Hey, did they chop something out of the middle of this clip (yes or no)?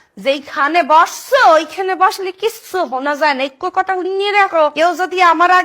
yes